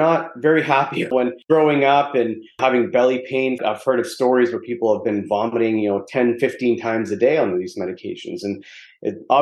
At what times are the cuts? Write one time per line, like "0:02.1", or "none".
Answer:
0:01.2
0:02.6